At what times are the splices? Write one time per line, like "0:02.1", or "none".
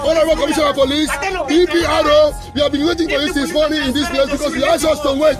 none